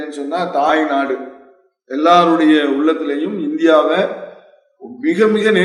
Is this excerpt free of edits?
yes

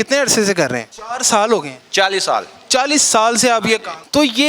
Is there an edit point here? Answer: no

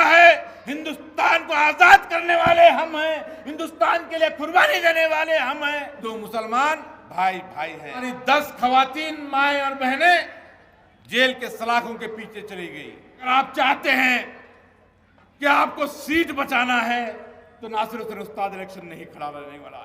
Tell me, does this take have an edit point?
yes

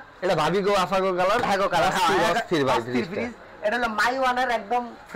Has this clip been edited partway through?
no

